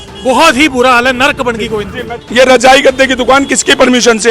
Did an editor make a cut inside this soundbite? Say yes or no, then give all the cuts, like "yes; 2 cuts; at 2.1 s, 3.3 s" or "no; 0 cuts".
yes; 1 cut; at 2.2 s